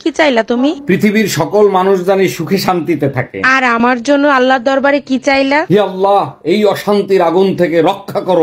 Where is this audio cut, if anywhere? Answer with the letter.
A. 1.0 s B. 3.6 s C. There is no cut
C